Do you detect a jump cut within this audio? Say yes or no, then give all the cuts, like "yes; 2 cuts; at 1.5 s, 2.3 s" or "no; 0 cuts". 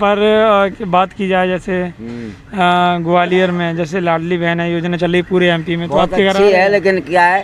no; 0 cuts